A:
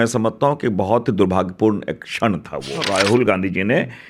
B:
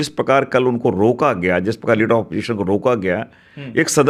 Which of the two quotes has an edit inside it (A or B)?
A